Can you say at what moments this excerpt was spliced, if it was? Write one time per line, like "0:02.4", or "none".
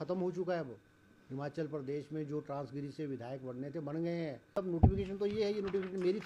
0:04.8